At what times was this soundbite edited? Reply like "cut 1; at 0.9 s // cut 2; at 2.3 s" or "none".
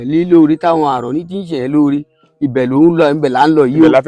none